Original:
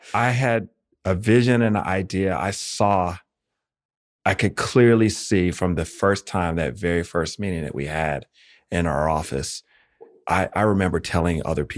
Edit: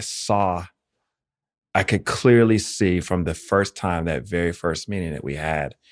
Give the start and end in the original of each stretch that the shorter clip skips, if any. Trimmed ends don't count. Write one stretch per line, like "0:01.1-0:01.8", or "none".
none